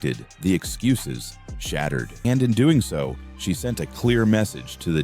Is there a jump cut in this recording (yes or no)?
yes